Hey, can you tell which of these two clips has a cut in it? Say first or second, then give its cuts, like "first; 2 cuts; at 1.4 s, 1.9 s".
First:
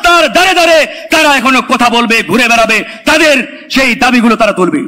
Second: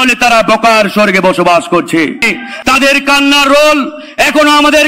second; 1 cut; at 2.4 s